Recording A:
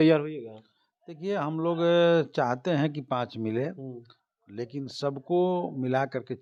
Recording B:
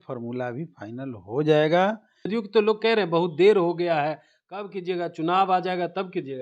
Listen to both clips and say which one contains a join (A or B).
B